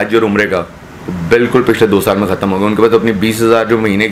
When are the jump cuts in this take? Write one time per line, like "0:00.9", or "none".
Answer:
none